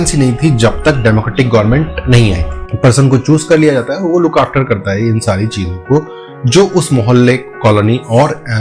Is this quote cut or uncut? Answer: cut